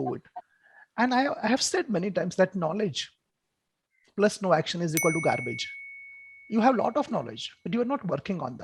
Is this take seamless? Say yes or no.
yes